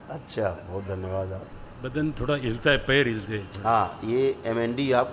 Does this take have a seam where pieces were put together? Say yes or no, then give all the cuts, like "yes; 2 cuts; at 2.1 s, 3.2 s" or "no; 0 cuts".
yes; 1 cut; at 1.5 s